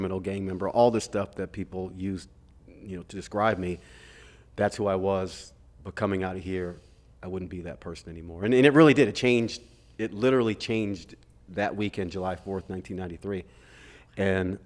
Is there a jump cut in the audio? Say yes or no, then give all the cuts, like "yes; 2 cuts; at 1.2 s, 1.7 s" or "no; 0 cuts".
no; 0 cuts